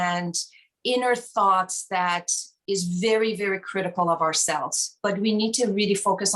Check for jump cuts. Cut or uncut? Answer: uncut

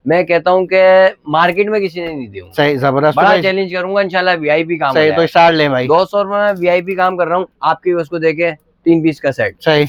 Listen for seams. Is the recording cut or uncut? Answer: uncut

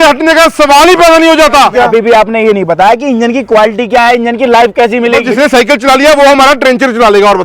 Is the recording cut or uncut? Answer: cut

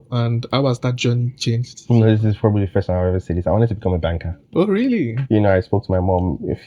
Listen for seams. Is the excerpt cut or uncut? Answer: cut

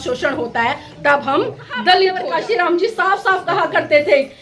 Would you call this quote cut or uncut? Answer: cut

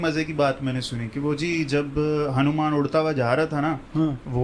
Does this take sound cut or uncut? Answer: uncut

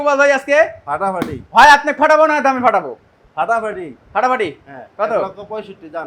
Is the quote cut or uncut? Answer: uncut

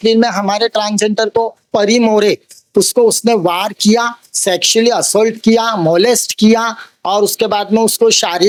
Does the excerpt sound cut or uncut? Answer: uncut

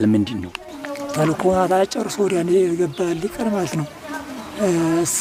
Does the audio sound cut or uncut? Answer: uncut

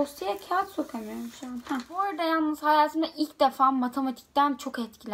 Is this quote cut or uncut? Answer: cut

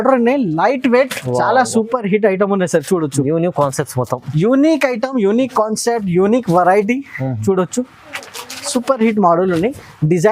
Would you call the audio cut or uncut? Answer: uncut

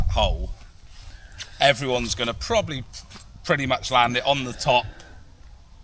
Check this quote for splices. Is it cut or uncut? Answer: uncut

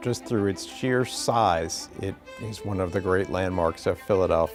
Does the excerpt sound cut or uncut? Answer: uncut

